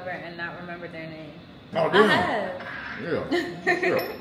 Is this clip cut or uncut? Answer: cut